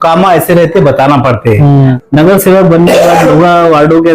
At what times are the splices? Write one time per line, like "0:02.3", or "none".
0:02.0

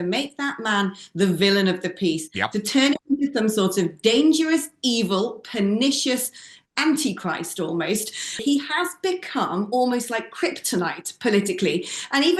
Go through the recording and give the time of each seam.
0:08.4

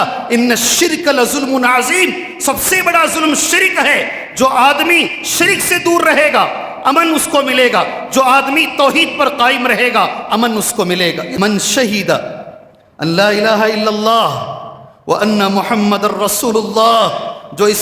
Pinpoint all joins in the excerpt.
0:11.3

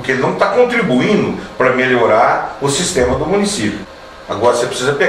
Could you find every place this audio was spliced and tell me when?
0:03.8

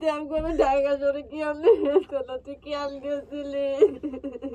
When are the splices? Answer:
none

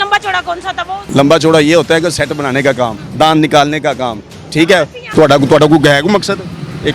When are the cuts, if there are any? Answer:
0:01.0
0:03.0
0:05.0

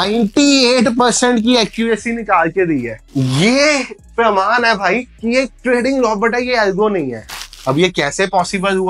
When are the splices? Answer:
none

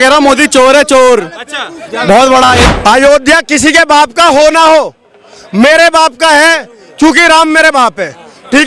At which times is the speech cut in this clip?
0:02.6

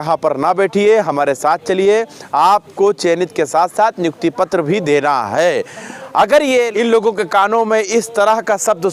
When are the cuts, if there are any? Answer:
0:06.7

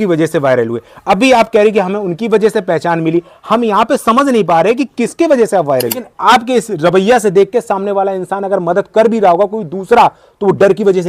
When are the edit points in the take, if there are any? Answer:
0:06.0

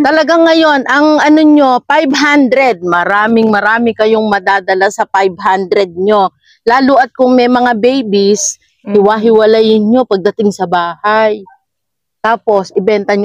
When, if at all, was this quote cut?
none

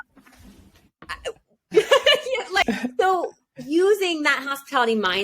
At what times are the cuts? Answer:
0:02.6

